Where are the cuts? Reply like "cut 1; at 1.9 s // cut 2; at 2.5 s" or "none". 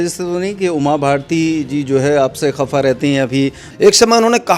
cut 1; at 3.6 s